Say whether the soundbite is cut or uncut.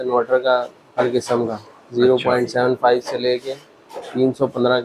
uncut